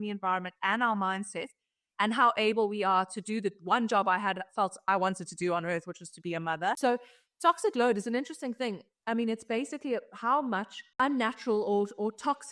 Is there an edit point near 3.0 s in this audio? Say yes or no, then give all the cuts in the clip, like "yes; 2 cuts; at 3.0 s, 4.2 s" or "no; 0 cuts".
no; 2 cuts; at 6.8 s, 10.9 s